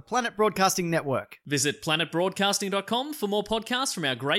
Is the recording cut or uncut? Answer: uncut